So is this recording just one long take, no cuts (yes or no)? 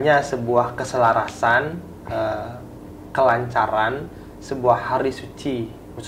yes